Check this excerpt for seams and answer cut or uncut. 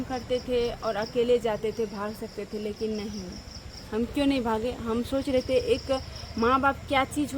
uncut